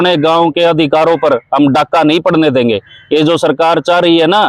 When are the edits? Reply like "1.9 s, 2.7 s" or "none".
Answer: none